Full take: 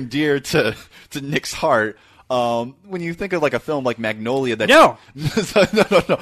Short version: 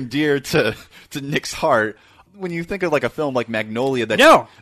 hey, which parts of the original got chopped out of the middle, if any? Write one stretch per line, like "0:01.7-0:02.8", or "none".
0:02.2-0:02.7